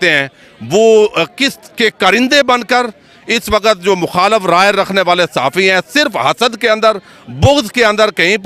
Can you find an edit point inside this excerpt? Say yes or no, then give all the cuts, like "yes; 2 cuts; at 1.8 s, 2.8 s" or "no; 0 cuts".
no; 0 cuts